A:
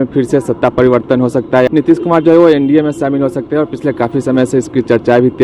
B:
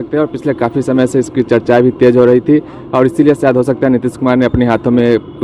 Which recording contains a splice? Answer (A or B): A